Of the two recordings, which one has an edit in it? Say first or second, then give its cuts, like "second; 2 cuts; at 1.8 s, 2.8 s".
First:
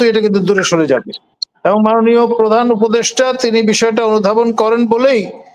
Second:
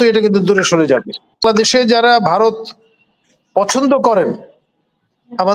second; 1 cut; at 1.4 s